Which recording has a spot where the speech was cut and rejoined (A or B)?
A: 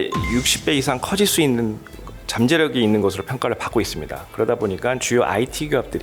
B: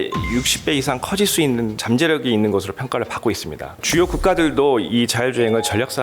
B